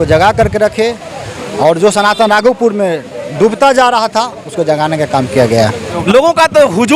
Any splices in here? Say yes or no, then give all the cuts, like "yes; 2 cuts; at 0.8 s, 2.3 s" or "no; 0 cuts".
yes; 1 cut; at 5.9 s